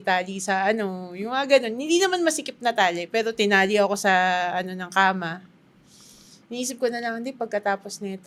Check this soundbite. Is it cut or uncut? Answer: uncut